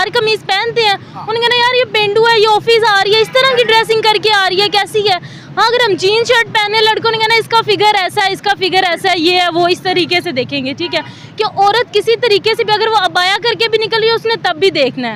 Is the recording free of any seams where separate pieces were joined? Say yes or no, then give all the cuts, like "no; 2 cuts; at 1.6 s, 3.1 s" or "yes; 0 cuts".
yes; 0 cuts